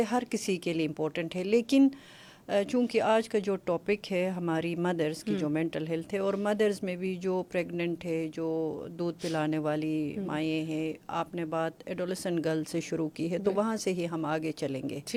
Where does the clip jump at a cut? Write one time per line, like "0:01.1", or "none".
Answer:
none